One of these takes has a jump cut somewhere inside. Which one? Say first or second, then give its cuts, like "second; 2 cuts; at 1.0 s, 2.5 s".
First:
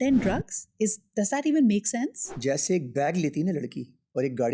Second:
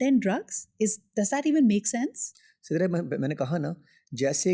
first; 1 cut; at 2.3 s